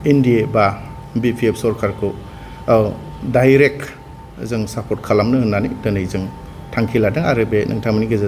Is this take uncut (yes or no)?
yes